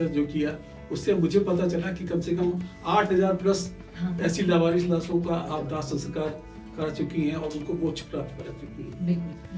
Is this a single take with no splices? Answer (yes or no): yes